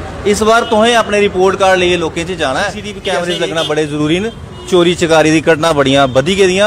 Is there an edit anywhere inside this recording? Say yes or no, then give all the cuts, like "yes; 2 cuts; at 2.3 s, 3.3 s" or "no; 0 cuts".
yes; 1 cut; at 2.9 s